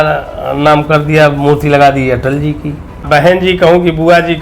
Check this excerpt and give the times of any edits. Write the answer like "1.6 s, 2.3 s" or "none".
3.0 s